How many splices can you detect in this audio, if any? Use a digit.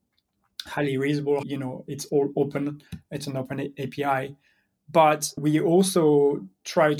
2